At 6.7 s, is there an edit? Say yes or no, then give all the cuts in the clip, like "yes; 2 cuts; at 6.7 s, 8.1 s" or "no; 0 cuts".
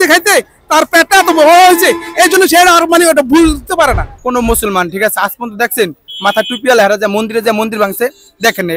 no; 1 cut; at 4.1 s